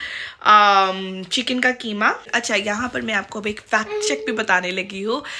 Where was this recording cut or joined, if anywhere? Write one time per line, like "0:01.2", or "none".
0:02.3